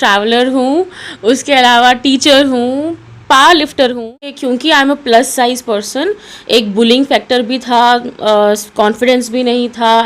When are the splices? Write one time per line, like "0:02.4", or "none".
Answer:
0:04.4